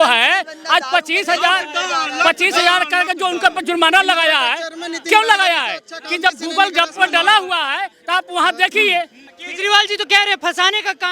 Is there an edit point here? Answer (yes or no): yes